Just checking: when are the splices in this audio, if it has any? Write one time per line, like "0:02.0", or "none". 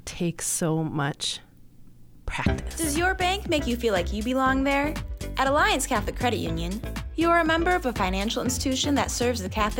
0:02.4